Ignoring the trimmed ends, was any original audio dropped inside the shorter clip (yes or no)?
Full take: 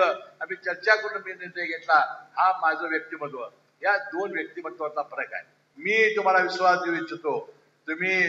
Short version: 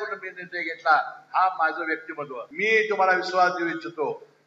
yes